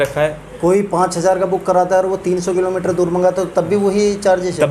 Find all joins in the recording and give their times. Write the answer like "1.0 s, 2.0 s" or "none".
none